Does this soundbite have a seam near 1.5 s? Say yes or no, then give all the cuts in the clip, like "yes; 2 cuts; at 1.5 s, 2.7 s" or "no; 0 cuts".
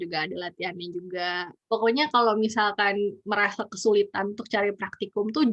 yes; 1 cut; at 1.5 s